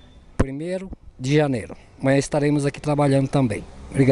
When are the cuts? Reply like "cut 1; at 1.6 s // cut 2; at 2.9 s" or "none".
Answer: none